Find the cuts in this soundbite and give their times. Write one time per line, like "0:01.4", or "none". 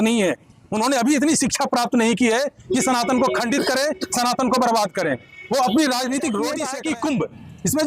0:06.7

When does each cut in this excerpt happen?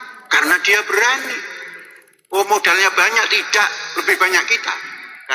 none

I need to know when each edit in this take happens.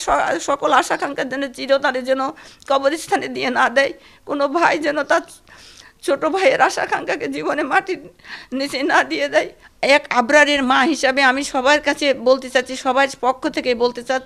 0:09.6

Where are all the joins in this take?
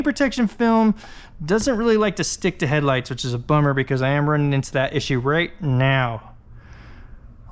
none

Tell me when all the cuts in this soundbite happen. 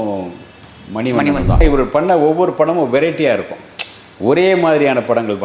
0:01.6

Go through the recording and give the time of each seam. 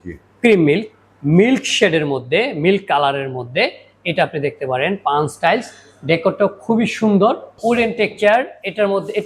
0:07.5

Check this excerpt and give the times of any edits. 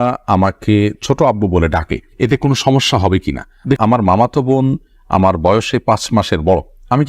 0:03.8

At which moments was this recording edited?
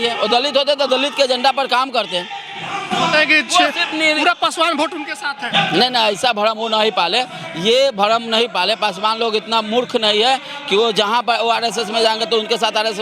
none

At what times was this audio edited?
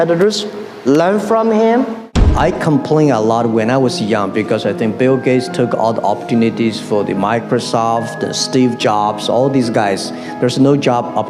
0:02.2

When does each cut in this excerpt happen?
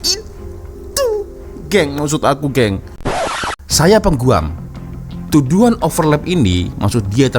0:03.2

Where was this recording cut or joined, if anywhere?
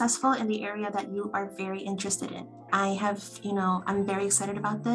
0:02.5

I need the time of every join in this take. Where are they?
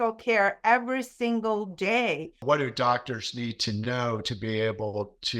0:02.3

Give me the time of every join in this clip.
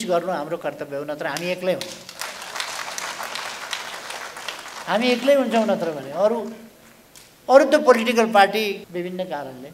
0:08.8

